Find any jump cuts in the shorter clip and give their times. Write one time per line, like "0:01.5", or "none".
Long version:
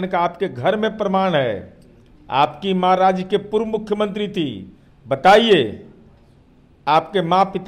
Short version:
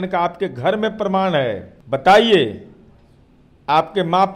0:01.7